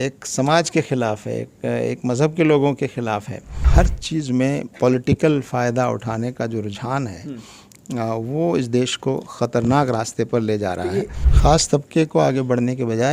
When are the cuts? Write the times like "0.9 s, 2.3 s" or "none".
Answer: 3.6 s, 11.2 s